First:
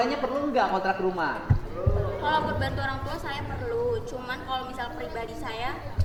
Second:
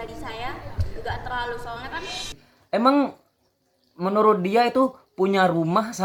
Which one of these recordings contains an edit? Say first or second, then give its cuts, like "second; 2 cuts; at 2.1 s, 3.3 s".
second; 1 cut; at 2.5 s